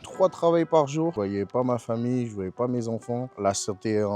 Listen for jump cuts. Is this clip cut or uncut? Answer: cut